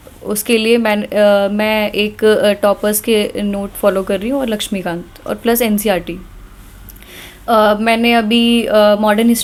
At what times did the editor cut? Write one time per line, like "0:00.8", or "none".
none